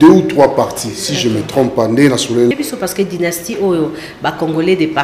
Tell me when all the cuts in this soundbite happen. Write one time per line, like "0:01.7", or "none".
0:02.5